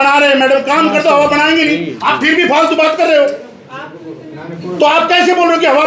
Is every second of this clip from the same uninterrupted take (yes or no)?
yes